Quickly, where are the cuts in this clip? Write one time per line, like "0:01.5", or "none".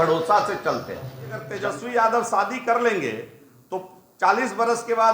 0:01.4